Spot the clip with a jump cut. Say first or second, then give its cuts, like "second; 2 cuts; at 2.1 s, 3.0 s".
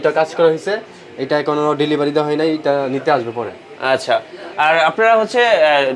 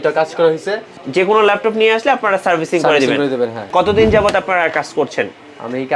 second; 2 cuts; at 1.0 s, 3.7 s